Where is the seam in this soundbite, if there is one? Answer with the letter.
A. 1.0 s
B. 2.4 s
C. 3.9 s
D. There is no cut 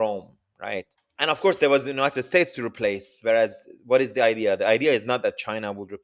A